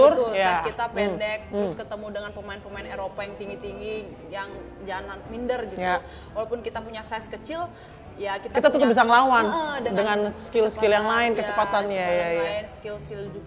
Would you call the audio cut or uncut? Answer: uncut